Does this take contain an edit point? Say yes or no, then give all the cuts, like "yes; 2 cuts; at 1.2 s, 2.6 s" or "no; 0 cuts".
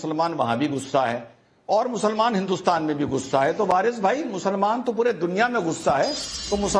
no; 0 cuts